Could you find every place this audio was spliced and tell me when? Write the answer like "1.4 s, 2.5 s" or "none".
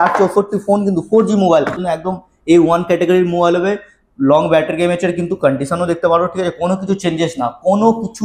1.8 s